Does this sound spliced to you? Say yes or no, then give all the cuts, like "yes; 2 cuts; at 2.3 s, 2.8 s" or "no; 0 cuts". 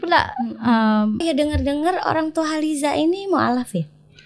yes; 1 cut; at 1.2 s